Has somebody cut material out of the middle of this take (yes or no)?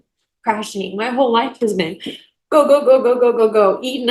no